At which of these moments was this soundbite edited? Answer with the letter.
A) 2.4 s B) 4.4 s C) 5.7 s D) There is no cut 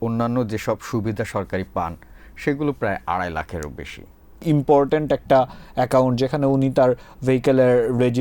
B